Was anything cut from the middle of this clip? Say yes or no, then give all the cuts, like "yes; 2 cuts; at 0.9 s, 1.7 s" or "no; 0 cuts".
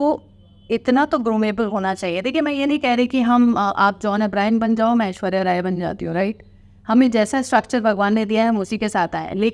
no; 0 cuts